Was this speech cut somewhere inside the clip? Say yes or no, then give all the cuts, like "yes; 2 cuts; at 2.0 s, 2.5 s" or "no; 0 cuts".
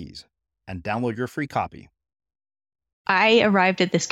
yes; 1 cut; at 3.0 s